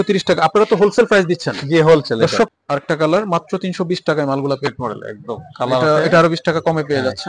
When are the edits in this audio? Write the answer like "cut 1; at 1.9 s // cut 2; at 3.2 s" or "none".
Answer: cut 1; at 2.5 s // cut 2; at 4.7 s